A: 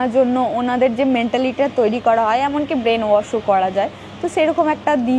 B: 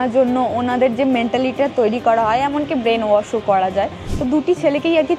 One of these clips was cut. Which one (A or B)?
B